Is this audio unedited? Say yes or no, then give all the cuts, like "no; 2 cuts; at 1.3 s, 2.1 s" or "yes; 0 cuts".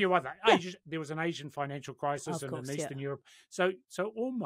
yes; 0 cuts